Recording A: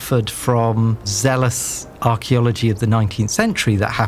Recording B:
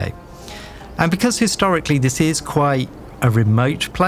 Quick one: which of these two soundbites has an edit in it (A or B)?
A